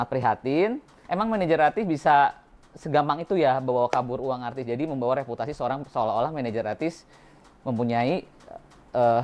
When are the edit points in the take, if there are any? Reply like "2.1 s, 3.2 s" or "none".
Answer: 0.9 s